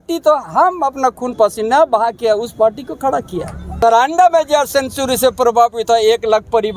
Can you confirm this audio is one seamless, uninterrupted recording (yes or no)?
no